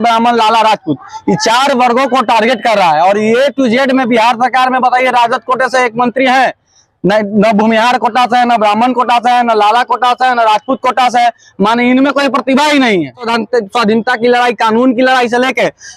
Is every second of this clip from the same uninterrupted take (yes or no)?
no